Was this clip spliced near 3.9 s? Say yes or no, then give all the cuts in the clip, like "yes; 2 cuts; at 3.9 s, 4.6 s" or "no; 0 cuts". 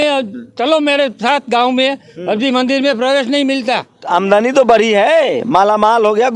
yes; 1 cut; at 3.9 s